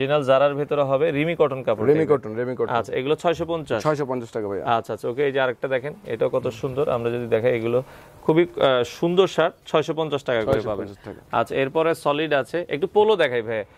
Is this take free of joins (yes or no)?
yes